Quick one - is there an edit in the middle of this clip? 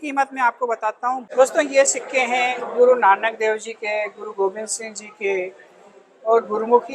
yes; 1 cut; at 1.3 s

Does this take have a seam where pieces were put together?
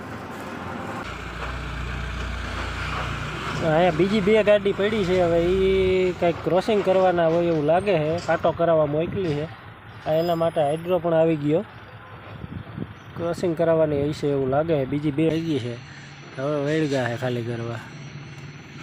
yes; 2 cuts; at 1.0 s, 15.3 s

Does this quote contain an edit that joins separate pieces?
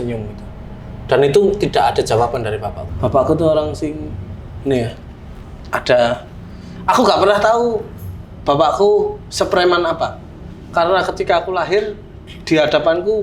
yes; 1 cut; at 2.8 s

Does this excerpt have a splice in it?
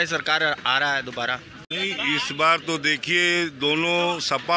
yes; 1 cut; at 1.6 s

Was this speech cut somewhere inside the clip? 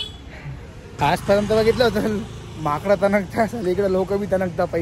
yes; 1 cut; at 1.0 s

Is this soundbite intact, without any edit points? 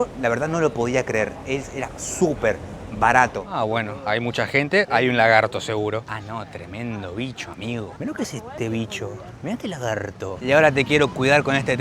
no; 2 cuts; at 3.4 s, 10.4 s

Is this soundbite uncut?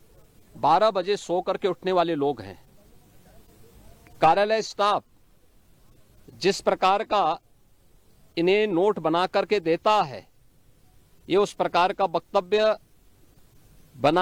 yes; 0 cuts

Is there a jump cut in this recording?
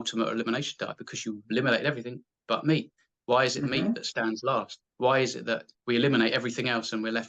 yes; 2 cuts; at 4.8 s, 5.7 s

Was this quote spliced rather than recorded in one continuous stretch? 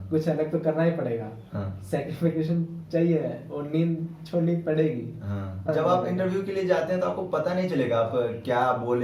yes; 1 cut; at 5.7 s

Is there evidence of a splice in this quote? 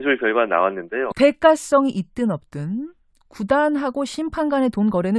no; 0 cuts

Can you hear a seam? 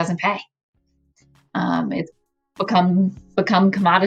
no; 0 cuts

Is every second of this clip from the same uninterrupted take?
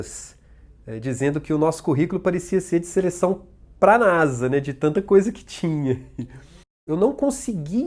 no; 1 cut; at 6.8 s

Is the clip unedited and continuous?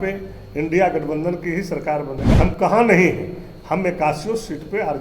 no; 1 cut; at 2.3 s

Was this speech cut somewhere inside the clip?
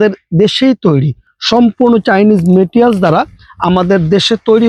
no; 0 cuts

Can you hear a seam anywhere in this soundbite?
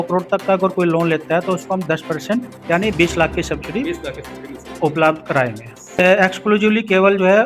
yes; 1 cut; at 6.0 s

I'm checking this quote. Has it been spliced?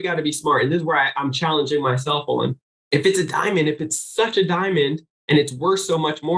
yes; 1 cut; at 2.7 s

